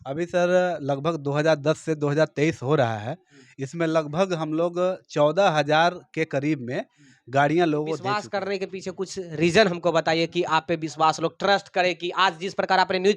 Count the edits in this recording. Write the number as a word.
one